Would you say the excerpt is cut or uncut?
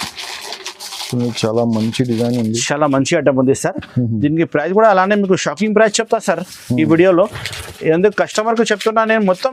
uncut